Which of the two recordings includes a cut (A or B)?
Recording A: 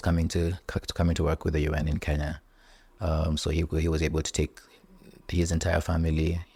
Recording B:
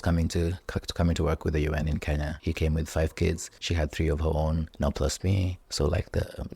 B